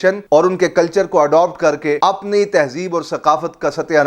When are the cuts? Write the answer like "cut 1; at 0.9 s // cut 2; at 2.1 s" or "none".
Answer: cut 1; at 2.0 s